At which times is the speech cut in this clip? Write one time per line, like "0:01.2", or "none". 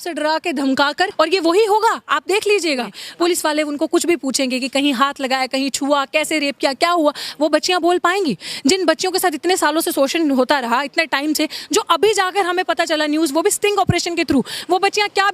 0:01.1
0:03.0